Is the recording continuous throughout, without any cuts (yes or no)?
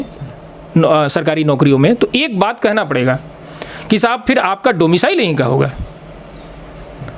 yes